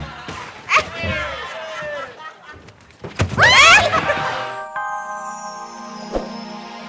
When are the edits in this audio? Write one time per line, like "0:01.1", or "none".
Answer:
0:04.3